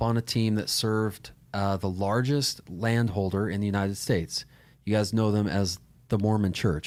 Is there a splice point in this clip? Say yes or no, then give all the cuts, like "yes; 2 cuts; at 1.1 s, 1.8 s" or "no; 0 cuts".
no; 0 cuts